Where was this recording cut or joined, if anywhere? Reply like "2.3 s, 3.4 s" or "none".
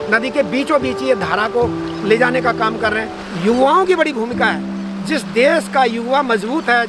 3.2 s